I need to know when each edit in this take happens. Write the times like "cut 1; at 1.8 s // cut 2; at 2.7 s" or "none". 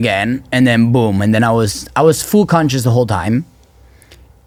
none